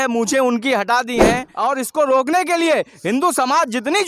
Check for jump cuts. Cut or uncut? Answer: cut